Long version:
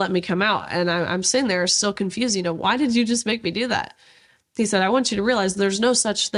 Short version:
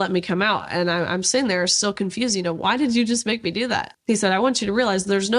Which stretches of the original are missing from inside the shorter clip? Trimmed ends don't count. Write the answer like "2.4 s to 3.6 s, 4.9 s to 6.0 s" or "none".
3.9 s to 4.4 s